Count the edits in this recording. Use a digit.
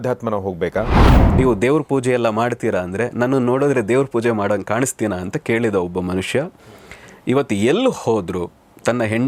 1